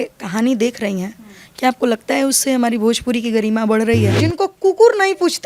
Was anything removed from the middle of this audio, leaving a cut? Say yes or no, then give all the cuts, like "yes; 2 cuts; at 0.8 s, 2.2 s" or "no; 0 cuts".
yes; 1 cut; at 4.1 s